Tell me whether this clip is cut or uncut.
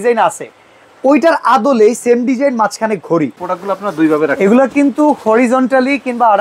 cut